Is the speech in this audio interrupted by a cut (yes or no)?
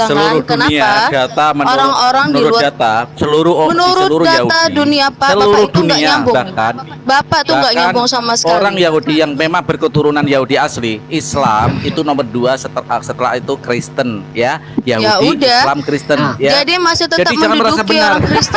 no